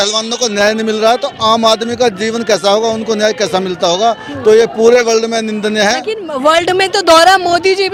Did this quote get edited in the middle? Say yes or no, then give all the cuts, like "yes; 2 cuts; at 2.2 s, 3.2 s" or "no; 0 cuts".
no; 0 cuts